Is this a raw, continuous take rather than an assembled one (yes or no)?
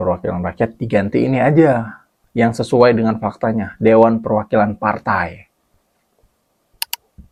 yes